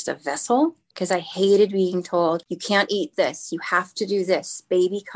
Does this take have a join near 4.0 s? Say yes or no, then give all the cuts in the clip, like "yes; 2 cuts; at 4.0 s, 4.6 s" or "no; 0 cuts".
no; 2 cuts; at 1.0 s, 2.5 s